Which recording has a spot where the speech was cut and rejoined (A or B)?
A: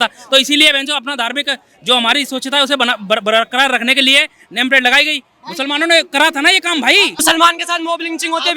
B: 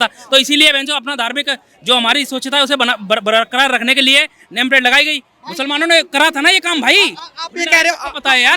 A